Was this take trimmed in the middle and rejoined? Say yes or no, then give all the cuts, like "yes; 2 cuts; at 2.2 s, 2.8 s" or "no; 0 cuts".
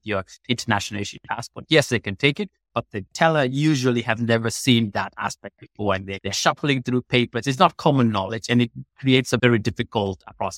yes; 2 cuts; at 6.1 s, 9.4 s